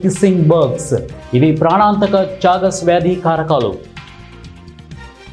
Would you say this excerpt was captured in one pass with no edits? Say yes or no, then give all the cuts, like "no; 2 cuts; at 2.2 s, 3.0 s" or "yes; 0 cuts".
no; 1 cut; at 3.9 s